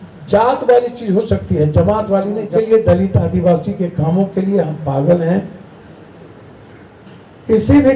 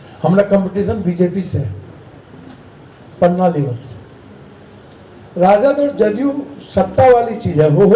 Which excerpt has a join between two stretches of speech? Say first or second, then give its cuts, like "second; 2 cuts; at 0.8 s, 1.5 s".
first; 1 cut; at 2.5 s